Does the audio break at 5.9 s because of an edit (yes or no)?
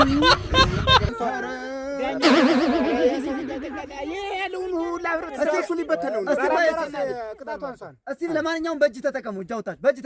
no